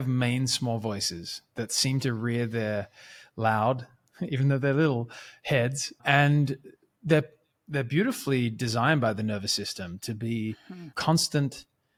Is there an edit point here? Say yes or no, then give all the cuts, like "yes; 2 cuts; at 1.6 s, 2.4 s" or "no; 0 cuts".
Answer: no; 0 cuts